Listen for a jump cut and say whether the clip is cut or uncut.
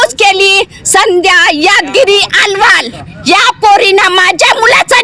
uncut